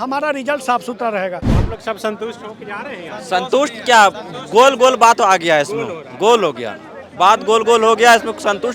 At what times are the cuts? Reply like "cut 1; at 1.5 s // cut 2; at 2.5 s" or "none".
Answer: cut 1; at 1.5 s